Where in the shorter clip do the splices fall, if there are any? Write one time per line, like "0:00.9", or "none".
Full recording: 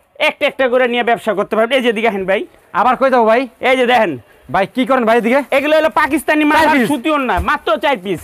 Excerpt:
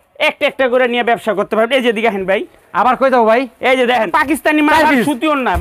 0:04.1